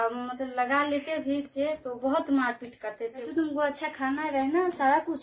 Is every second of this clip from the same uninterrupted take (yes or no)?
no